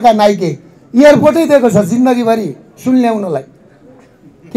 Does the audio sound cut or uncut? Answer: uncut